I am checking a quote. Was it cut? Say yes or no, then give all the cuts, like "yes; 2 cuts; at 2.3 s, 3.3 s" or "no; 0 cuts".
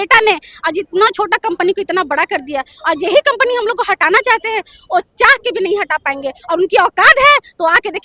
no; 0 cuts